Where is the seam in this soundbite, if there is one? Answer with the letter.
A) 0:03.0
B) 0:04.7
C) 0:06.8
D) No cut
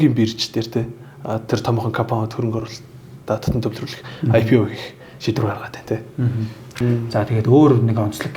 C